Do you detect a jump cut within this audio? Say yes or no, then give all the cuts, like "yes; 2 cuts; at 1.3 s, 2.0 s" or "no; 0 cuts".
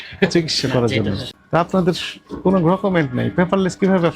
yes; 1 cut; at 1.3 s